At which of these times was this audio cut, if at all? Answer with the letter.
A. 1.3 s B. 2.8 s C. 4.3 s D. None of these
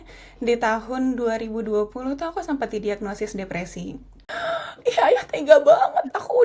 C